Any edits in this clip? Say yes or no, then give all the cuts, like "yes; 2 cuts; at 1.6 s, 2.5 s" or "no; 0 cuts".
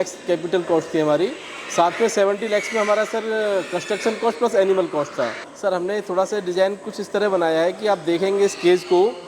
yes; 1 cut; at 5.5 s